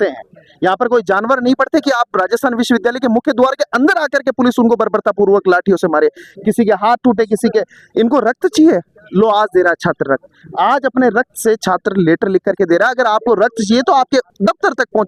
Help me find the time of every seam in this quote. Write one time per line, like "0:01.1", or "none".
none